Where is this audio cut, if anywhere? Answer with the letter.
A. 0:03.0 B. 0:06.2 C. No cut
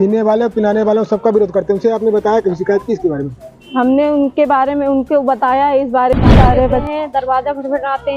B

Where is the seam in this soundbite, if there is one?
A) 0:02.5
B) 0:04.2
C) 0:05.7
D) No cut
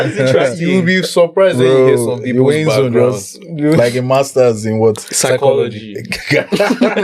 D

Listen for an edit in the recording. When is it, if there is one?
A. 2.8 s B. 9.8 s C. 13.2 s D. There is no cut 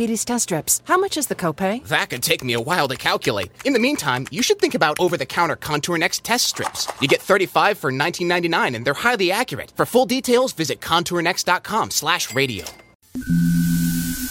C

